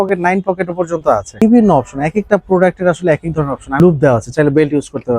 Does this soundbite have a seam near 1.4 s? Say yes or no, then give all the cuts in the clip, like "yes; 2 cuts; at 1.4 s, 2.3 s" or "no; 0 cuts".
yes; 2 cuts; at 1.4 s, 3.8 s